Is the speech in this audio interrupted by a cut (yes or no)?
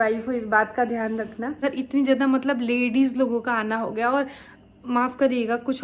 yes